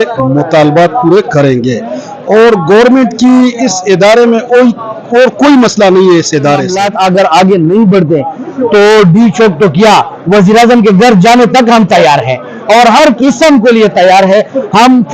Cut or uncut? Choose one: cut